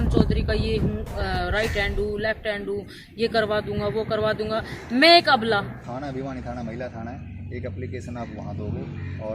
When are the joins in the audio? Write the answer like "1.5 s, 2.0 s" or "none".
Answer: 5.8 s